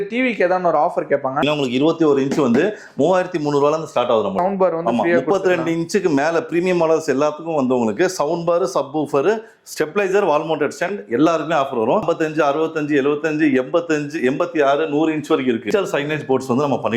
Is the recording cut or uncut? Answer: cut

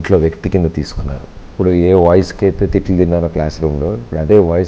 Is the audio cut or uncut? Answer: cut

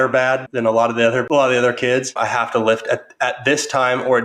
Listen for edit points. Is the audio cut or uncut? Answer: cut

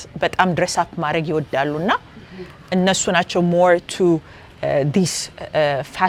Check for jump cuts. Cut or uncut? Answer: uncut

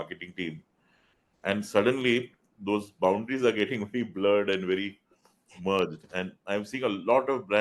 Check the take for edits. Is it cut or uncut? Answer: uncut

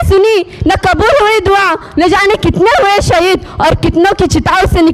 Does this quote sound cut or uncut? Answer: uncut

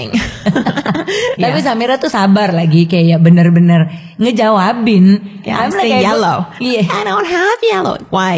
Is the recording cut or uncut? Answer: cut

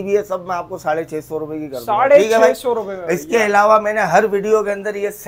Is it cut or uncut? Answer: uncut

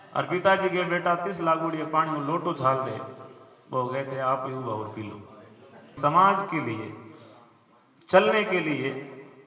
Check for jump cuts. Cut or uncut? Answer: cut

